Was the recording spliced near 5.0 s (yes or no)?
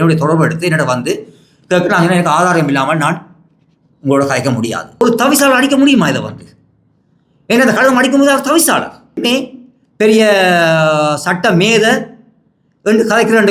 yes